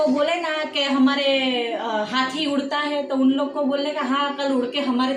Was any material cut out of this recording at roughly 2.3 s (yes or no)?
no